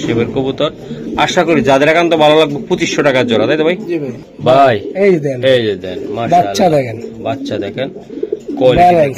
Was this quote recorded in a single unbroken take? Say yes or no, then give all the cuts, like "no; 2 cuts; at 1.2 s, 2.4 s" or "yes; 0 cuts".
yes; 0 cuts